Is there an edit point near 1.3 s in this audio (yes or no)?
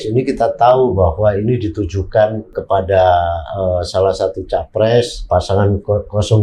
no